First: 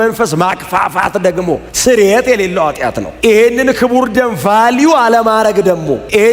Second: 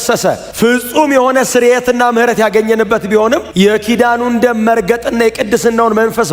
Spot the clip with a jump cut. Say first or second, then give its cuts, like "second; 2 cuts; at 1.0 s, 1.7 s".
first; 1 cut; at 3.1 s